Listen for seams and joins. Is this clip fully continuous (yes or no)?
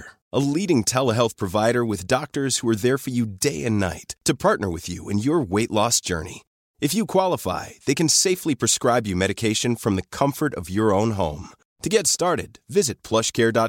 yes